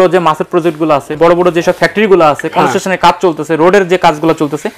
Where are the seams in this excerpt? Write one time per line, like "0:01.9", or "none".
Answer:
0:01.2